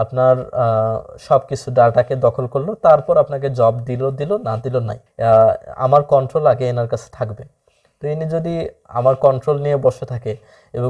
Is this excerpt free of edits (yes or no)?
no